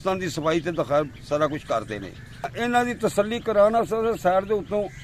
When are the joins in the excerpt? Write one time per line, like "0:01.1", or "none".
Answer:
0:02.5